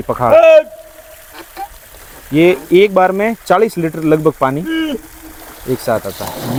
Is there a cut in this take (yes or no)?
no